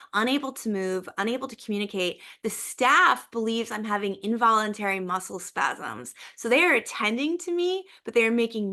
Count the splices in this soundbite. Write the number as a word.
zero